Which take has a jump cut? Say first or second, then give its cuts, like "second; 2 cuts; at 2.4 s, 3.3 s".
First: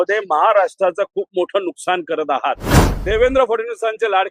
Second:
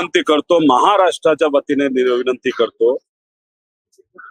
first; 1 cut; at 2.6 s